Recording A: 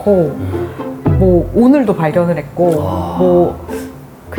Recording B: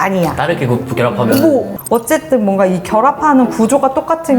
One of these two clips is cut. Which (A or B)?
B